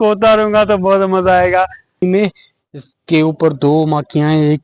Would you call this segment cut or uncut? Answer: cut